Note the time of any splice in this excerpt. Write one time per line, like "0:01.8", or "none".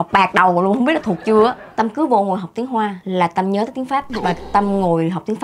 0:01.6
0:03.0
0:04.1